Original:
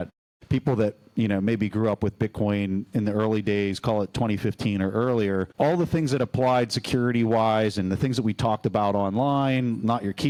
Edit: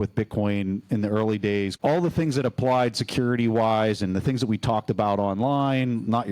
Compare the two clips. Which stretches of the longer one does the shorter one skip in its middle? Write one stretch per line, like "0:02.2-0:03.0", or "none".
0:03.8-0:05.5